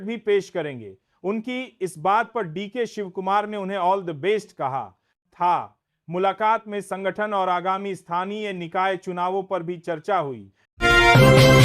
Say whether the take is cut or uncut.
cut